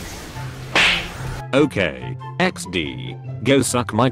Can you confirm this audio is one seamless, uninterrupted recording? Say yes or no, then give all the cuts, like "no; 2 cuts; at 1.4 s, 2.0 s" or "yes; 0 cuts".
no; 1 cut; at 1.4 s